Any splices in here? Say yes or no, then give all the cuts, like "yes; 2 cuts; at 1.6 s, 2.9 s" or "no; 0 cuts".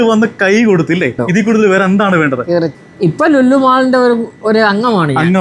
yes; 2 cuts; at 1.3 s, 2.8 s